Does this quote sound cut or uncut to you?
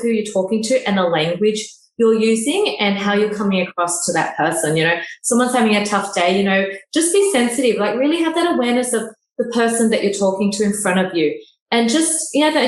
uncut